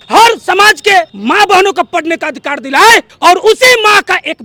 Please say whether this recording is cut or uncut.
uncut